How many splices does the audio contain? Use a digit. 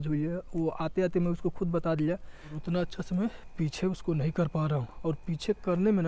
1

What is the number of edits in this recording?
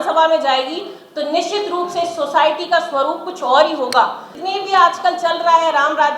1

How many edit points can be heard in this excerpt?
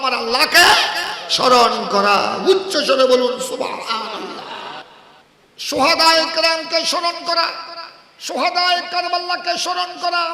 1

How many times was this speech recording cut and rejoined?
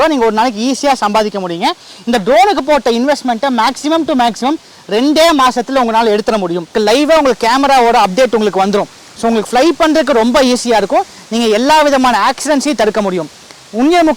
1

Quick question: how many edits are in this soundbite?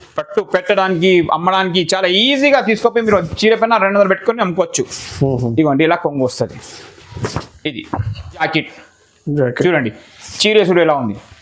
1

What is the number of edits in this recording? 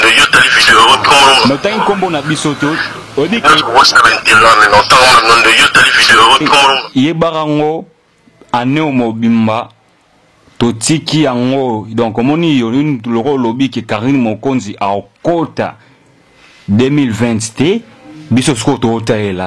1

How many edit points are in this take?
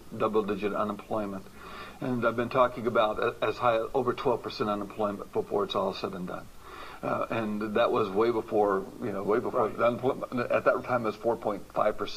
1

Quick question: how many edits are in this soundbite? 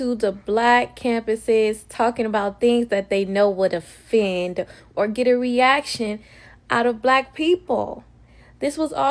0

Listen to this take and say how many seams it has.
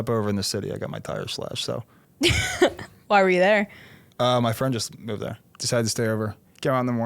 2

